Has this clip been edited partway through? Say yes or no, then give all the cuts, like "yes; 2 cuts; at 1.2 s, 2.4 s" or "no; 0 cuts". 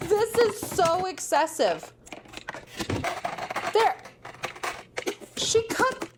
no; 0 cuts